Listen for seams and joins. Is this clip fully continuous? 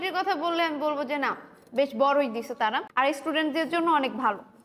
yes; 0 cuts

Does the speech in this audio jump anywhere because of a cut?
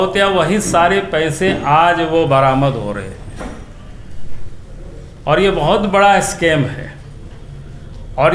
no; 0 cuts

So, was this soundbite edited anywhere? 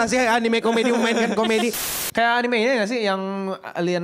yes; 1 cut; at 1.9 s

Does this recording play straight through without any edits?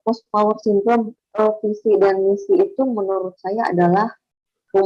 no; 1 cut; at 1.1 s

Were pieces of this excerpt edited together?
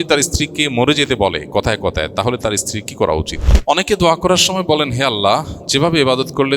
yes; 1 cut; at 3.4 s

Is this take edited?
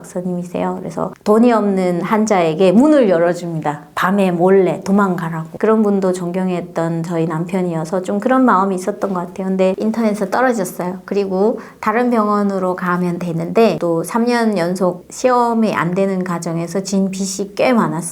yes; 1 cut; at 13.8 s

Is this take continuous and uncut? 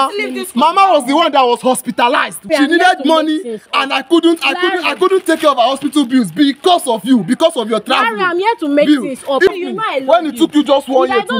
no; 2 cuts; at 2.5 s, 9.5 s

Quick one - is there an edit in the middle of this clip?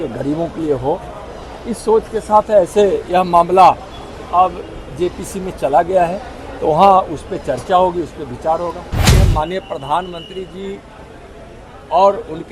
yes; 1 cut; at 9.0 s

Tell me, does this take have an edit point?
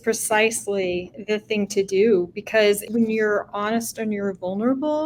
yes; 1 cut; at 2.8 s

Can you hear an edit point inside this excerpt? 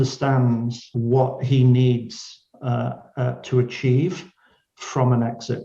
yes; 1 cut; at 0.9 s

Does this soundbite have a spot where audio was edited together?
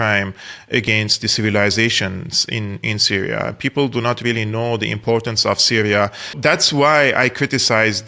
yes; 1 cut; at 6.3 s

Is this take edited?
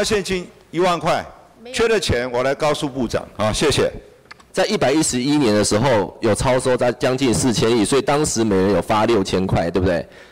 yes; 1 cut; at 4.4 s

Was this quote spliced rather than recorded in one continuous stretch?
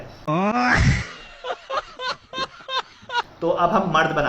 yes; 1 cut; at 3.3 s

